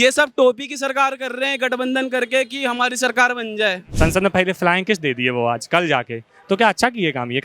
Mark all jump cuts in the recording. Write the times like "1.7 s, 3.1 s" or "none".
3.9 s